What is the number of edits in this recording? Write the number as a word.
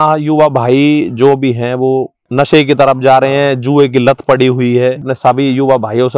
two